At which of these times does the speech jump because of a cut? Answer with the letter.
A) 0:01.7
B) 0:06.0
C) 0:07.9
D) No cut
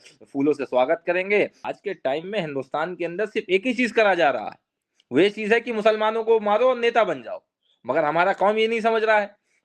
A